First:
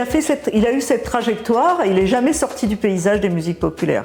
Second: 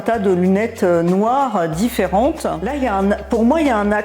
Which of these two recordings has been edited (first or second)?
second